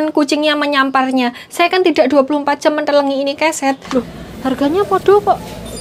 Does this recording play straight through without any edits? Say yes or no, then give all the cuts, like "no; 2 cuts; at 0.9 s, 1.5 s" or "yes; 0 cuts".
no; 1 cut; at 3.8 s